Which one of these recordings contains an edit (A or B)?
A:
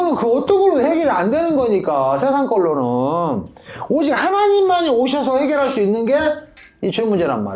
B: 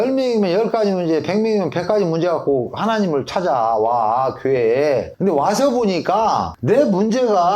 B